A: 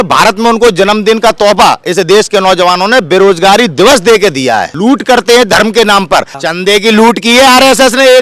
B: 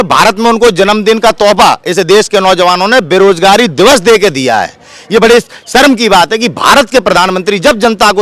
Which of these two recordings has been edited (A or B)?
A